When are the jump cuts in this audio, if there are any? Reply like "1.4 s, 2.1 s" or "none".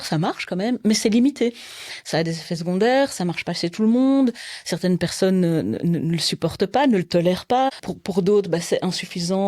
7.7 s